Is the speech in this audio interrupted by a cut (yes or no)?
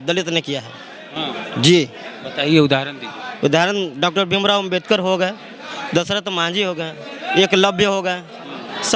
no